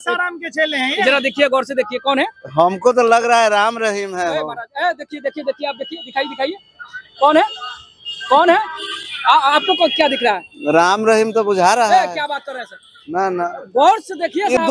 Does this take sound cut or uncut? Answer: uncut